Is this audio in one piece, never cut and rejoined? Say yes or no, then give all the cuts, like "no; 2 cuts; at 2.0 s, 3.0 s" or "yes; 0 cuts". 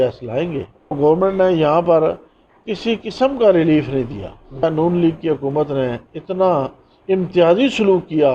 no; 2 cuts; at 1.0 s, 4.6 s